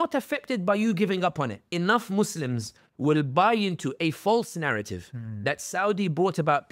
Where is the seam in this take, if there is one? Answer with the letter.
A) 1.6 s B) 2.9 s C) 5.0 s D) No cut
A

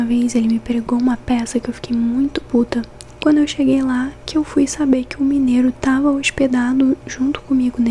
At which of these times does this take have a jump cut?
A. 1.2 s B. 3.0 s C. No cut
B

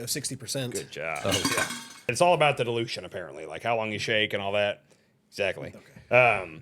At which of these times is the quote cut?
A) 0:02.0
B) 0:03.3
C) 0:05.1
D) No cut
A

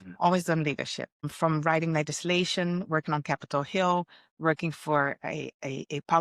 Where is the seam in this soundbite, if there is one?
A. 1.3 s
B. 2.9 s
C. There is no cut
A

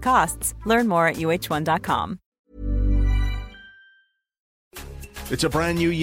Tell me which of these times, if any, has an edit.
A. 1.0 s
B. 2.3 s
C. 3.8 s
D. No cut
B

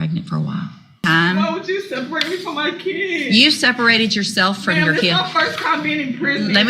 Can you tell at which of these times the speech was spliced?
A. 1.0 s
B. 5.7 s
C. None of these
A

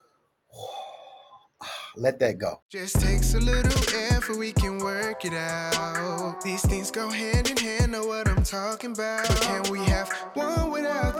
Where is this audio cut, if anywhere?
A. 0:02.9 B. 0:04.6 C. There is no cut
A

